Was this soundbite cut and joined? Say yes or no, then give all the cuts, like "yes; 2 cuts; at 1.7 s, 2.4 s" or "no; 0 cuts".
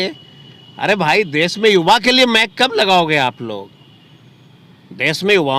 no; 0 cuts